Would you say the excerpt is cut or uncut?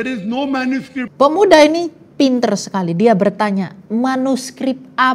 cut